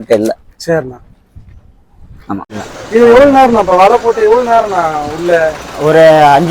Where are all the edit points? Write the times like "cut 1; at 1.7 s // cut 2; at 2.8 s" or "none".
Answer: cut 1; at 2.5 s